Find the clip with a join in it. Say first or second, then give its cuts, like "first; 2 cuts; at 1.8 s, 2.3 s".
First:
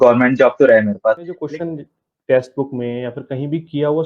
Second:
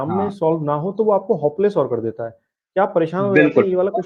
first; 1 cut; at 1.3 s